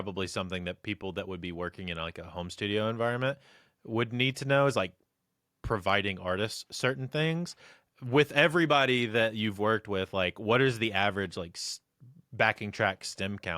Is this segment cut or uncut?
uncut